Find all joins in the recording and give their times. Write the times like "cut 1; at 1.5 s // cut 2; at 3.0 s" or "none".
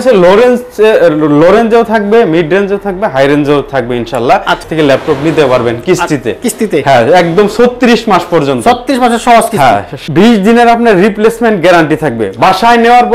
cut 1; at 4.7 s // cut 2; at 10.0 s